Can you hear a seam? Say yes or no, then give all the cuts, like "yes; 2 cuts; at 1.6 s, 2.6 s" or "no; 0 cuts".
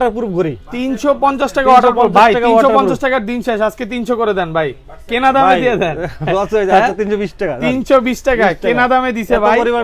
no; 0 cuts